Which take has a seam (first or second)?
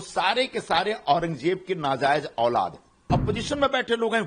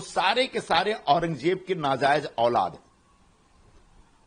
first